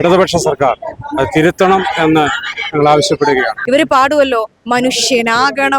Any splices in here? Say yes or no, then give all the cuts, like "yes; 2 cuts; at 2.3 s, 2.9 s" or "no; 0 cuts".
yes; 1 cut; at 3.6 s